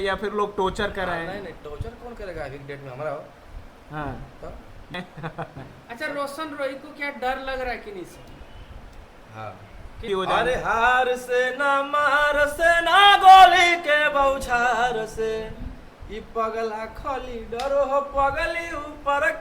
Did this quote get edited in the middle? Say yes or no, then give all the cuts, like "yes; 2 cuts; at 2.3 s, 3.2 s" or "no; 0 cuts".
yes; 2 cuts; at 4.9 s, 10.0 s